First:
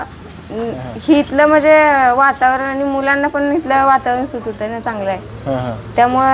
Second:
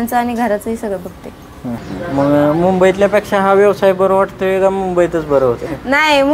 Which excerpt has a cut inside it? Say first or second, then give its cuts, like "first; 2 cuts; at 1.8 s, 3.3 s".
second; 1 cut; at 1.8 s